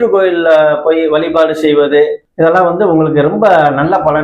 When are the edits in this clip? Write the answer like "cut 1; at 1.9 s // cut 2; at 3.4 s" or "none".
cut 1; at 2.2 s

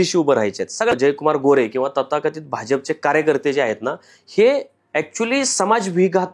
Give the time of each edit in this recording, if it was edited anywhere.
cut 1; at 0.9 s

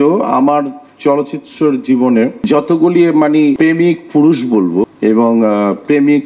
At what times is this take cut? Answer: cut 1; at 2.4 s // cut 2; at 3.6 s // cut 3; at 4.9 s

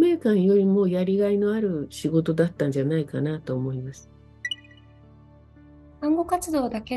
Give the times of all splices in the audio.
none

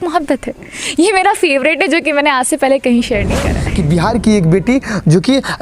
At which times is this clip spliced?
cut 1; at 3.6 s

